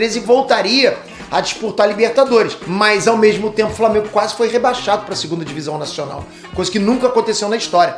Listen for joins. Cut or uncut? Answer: uncut